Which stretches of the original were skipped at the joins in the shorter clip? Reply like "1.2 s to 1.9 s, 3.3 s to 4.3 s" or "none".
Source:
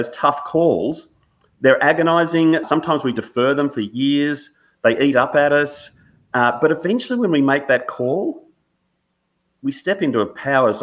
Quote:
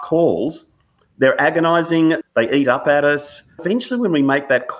2.6 s to 4.7 s, 6.1 s to 6.8 s